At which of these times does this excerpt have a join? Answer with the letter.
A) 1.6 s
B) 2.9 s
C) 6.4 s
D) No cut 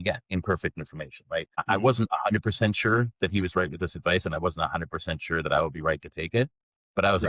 A